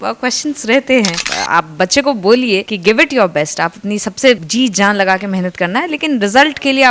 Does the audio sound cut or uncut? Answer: cut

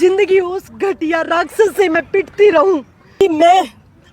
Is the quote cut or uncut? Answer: cut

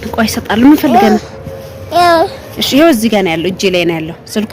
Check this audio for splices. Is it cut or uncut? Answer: uncut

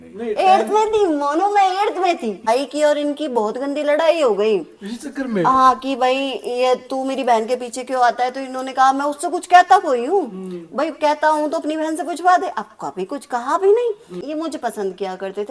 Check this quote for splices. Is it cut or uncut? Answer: cut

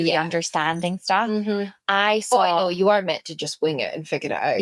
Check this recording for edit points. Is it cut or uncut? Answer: uncut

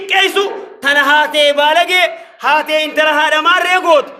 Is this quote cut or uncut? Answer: uncut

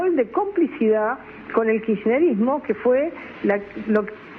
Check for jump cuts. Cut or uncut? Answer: uncut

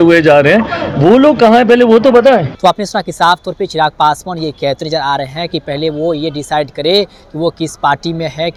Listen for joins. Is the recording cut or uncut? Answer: uncut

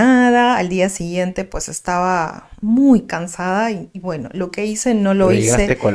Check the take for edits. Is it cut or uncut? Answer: uncut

